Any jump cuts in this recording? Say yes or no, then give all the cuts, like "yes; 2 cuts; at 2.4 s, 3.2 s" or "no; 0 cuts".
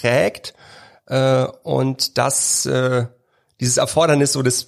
no; 0 cuts